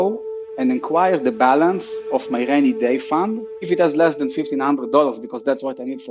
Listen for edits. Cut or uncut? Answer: uncut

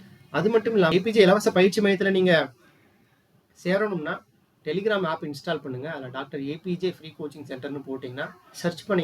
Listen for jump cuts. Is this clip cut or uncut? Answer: cut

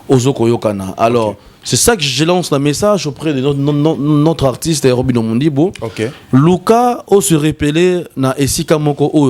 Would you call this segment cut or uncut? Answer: uncut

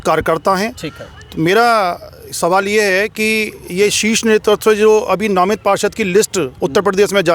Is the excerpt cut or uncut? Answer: uncut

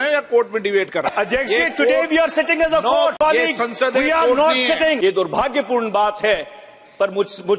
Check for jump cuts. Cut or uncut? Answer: cut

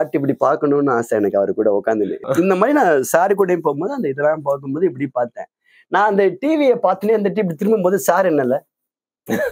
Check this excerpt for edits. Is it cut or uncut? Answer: cut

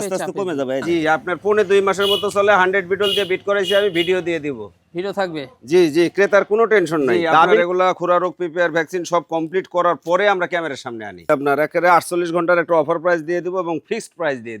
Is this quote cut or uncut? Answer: cut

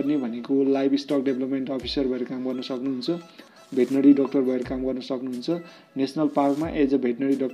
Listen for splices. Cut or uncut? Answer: uncut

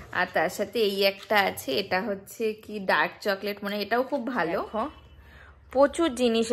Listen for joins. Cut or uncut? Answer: cut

